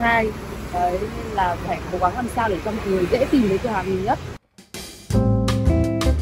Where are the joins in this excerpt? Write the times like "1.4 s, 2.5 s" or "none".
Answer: none